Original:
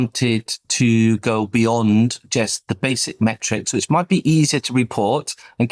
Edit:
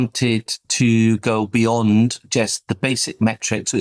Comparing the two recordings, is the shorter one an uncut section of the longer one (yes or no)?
yes